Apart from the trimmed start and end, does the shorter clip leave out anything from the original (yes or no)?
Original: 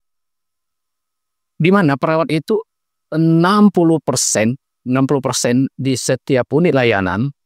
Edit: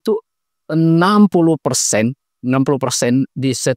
no